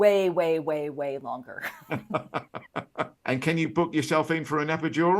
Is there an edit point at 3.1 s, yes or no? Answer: yes